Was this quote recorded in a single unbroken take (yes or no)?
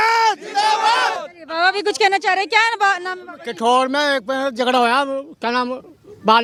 yes